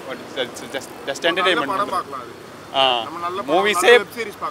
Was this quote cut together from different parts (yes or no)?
no